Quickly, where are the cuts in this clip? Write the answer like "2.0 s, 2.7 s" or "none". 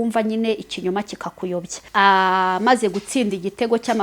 1.8 s